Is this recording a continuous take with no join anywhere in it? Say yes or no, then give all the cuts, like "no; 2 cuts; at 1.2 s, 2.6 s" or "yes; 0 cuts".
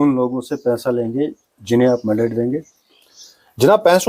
yes; 0 cuts